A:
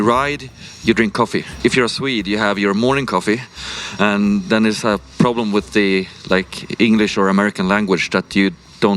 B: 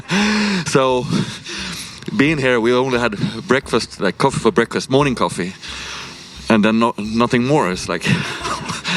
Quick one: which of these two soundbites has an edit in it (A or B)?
A